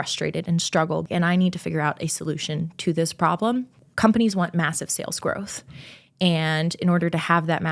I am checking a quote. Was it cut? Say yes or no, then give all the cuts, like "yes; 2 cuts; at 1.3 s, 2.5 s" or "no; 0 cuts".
yes; 2 cuts; at 1.0 s, 3.8 s